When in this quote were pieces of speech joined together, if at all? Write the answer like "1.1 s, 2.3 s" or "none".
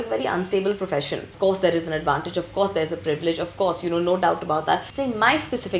1.3 s, 4.9 s